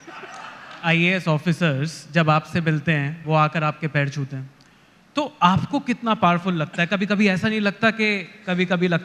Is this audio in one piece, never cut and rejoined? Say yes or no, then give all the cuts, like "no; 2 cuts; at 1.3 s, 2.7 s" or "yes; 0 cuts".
no; 2 cuts; at 0.8 s, 3.2 s